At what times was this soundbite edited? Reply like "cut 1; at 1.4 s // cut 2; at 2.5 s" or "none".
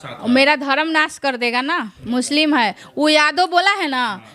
none